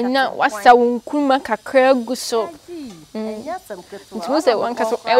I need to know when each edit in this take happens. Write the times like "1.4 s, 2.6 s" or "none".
none